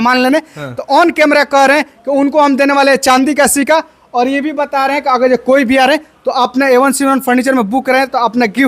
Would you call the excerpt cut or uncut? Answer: uncut